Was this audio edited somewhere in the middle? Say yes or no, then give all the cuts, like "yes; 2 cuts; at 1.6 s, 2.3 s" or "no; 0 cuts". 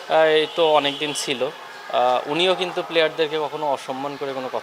no; 0 cuts